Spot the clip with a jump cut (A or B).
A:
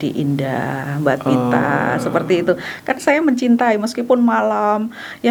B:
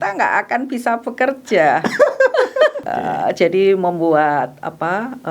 B